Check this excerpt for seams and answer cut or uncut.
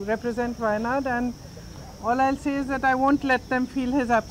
uncut